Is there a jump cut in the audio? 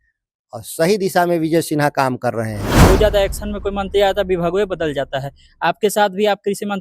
yes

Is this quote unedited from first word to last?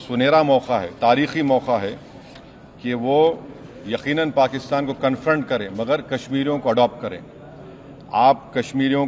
yes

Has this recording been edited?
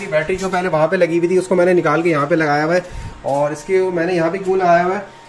no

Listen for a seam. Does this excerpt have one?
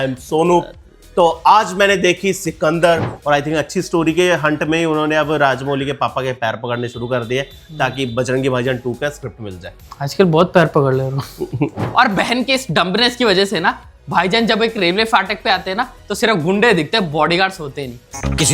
yes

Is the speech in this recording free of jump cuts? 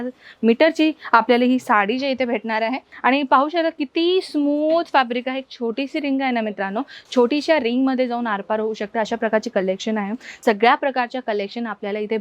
no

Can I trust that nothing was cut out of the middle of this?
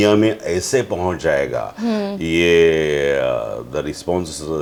yes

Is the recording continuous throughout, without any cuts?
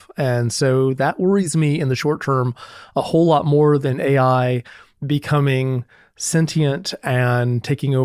yes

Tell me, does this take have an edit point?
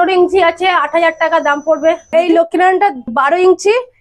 yes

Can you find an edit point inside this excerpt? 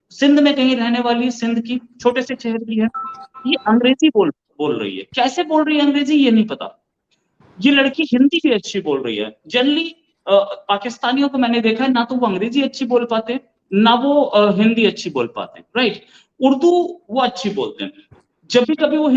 no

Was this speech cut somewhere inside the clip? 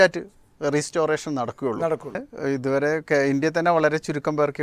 yes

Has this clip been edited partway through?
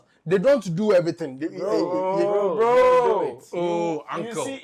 no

